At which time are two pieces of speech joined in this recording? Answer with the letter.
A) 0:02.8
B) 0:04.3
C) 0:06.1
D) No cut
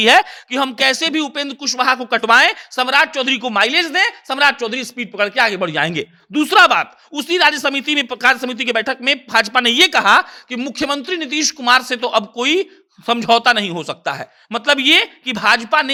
D